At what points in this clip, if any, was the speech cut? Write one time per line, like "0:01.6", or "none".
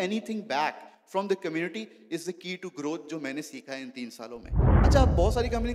0:04.7